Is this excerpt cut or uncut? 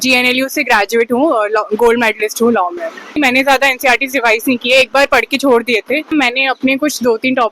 cut